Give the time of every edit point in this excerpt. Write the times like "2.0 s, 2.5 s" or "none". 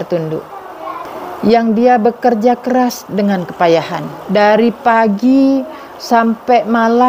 1.1 s